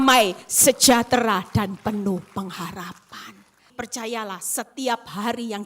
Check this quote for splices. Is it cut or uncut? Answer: cut